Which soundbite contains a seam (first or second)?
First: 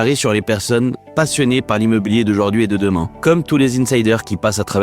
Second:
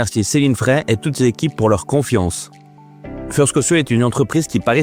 first